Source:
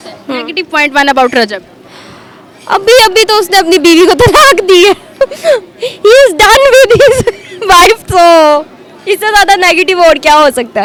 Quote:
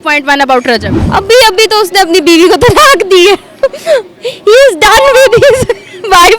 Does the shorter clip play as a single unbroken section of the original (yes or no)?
no